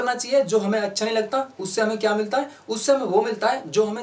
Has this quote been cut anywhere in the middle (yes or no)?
no